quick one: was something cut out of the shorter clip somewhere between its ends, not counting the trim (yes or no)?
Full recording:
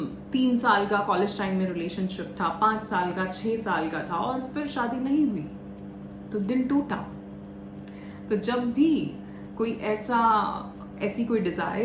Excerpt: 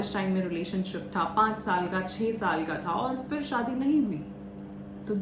no